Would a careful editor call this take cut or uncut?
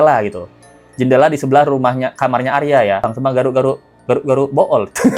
cut